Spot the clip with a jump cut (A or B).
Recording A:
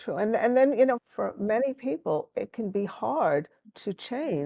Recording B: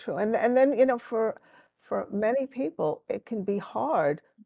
A